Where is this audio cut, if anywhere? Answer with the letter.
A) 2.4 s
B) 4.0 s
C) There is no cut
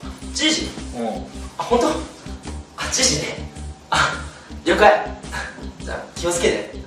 A